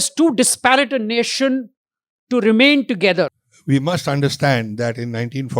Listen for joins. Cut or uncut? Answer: cut